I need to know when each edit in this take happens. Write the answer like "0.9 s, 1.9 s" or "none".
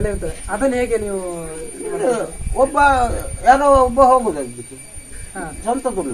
none